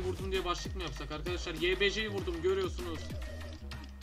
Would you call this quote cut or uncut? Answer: uncut